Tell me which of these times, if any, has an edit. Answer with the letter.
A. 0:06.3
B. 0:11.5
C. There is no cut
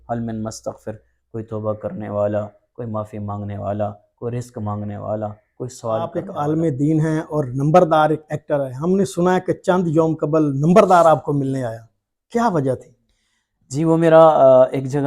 A